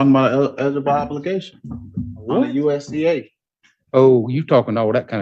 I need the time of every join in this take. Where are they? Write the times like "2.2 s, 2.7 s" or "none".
none